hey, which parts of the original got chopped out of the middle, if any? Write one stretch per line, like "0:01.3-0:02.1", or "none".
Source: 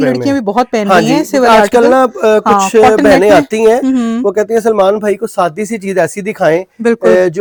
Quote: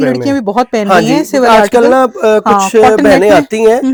none